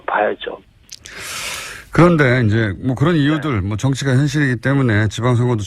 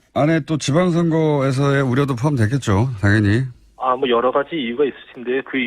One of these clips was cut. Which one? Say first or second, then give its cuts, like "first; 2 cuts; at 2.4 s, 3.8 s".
second; 1 cut; at 2.1 s